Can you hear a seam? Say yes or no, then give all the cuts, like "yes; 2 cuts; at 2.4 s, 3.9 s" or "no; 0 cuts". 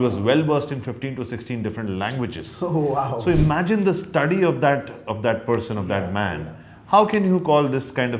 no; 0 cuts